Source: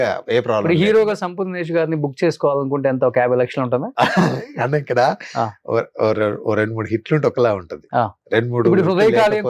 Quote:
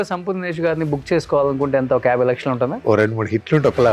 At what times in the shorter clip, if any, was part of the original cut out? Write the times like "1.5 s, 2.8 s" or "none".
2.8 s